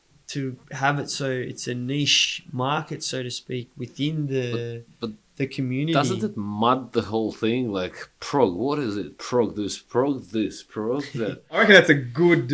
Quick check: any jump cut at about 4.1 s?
no; 1 cut; at 11.6 s

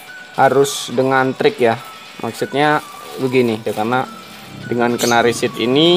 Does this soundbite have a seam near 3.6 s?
yes; 1 cut; at 3.6 s

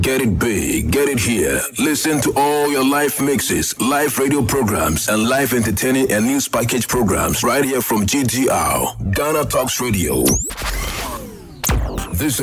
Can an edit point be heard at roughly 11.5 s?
yes; 1 cut; at 11.5 s

